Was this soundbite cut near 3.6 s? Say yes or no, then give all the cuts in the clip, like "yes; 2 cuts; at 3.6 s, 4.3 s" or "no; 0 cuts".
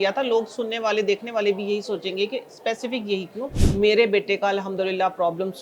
yes; 1 cut; at 3.6 s